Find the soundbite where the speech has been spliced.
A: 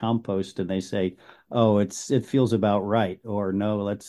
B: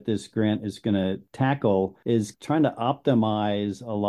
B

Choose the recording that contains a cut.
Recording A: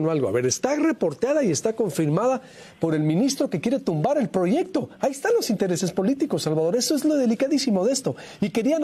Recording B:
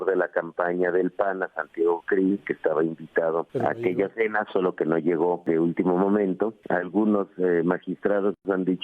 B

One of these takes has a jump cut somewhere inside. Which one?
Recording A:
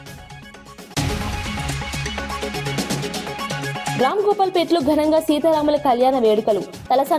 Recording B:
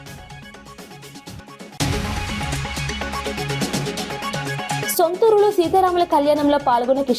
A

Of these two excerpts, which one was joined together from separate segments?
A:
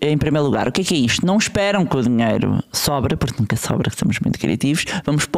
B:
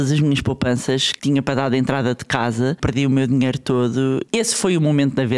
B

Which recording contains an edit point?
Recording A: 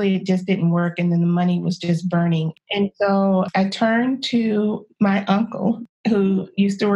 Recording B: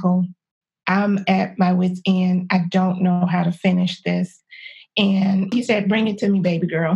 A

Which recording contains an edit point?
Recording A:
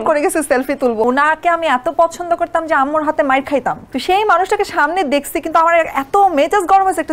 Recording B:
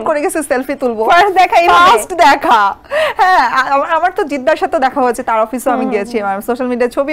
A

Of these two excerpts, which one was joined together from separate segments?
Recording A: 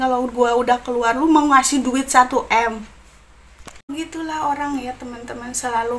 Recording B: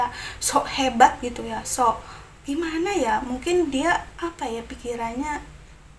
A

